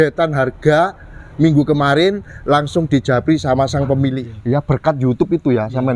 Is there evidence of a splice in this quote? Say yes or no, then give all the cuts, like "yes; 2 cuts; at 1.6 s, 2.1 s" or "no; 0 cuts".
yes; 1 cut; at 4.3 s